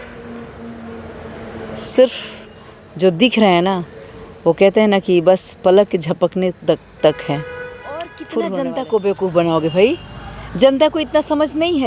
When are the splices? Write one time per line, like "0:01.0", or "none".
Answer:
0:08.2